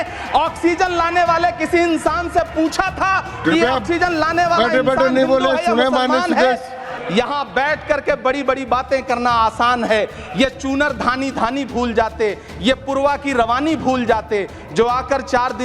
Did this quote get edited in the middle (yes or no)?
yes